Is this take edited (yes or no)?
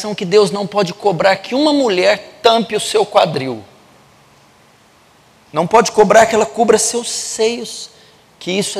yes